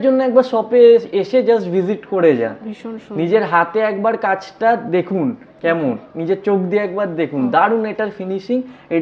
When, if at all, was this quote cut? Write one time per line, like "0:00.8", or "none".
none